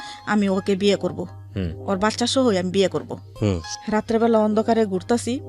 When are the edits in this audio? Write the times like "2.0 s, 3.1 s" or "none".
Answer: 3.2 s